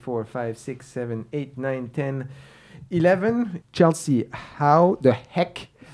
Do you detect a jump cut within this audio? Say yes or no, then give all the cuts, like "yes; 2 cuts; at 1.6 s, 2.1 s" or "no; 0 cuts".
yes; 1 cut; at 3.6 s